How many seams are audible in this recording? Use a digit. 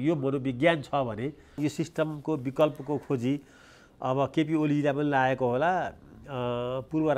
1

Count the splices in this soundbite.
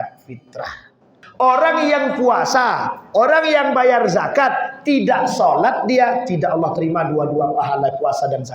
1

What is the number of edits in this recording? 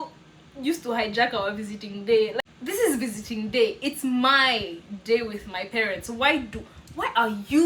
1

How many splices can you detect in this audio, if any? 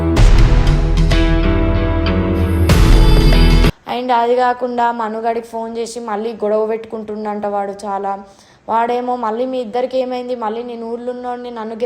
1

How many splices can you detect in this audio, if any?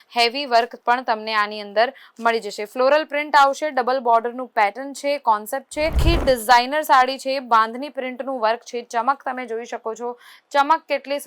1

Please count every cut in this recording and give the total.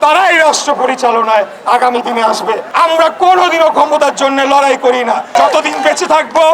2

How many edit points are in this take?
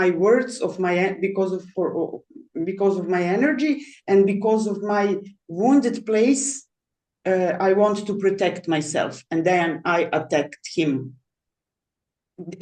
0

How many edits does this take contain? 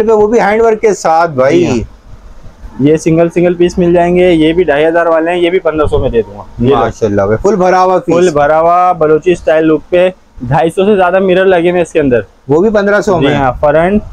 0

